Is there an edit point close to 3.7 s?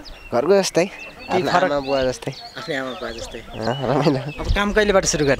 yes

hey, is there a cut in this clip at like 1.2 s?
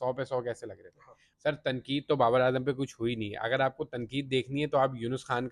yes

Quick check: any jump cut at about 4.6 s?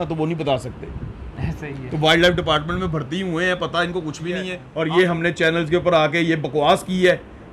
yes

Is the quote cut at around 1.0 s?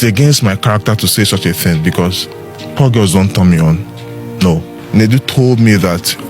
no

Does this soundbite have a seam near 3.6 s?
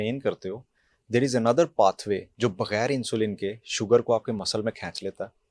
no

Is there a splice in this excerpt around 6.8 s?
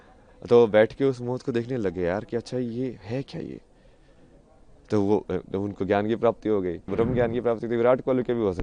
yes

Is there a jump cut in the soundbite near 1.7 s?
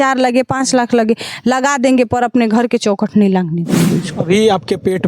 no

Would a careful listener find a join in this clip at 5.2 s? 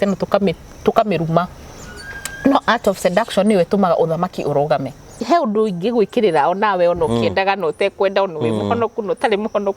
yes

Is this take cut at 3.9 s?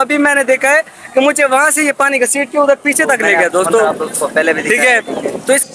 yes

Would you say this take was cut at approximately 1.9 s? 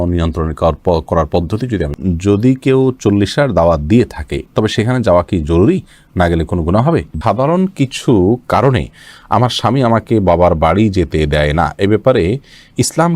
yes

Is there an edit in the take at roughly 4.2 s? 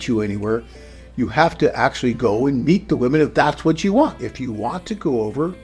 yes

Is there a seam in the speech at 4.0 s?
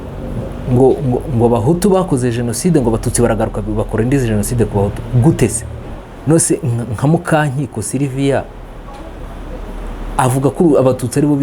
no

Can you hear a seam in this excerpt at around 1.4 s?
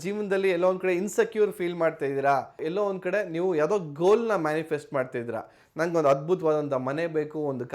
no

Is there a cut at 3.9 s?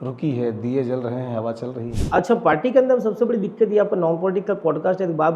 no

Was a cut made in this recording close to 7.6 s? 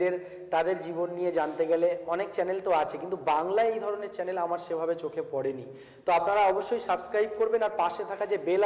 no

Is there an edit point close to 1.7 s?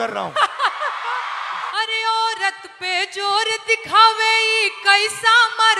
yes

